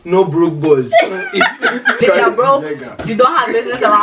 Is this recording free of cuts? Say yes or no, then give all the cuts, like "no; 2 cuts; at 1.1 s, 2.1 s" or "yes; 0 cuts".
no; 1 cut; at 2.0 s